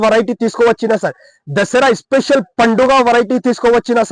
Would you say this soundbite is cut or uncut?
uncut